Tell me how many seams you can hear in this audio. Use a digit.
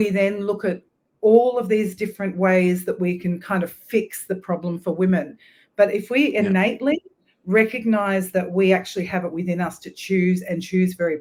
0